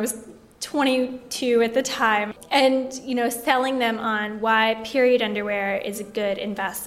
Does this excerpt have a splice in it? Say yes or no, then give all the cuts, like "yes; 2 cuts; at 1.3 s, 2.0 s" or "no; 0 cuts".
yes; 1 cut; at 2.3 s